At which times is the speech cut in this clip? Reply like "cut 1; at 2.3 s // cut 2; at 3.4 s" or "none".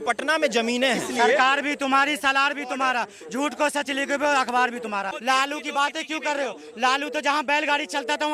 cut 1; at 1.0 s // cut 2; at 5.1 s